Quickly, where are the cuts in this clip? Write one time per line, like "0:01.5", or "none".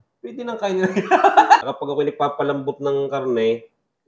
0:01.6